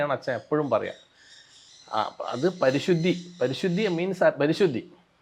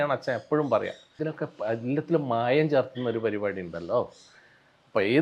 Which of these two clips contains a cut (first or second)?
second